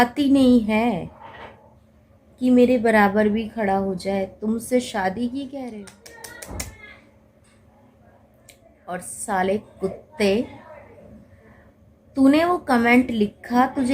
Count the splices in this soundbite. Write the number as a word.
two